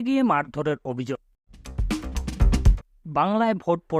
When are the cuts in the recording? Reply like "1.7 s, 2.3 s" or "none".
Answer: 1.1 s, 2.9 s